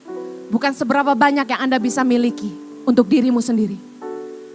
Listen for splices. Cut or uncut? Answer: uncut